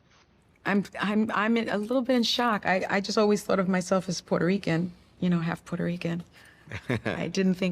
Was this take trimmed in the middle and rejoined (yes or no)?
no